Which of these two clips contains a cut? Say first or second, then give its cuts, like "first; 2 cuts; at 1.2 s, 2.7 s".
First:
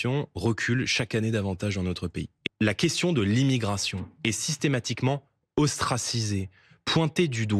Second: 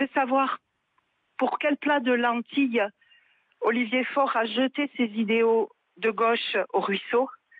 first; 1 cut; at 2.4 s